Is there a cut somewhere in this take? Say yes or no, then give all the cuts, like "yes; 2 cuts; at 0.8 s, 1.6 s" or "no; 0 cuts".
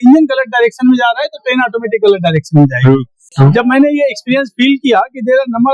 no; 0 cuts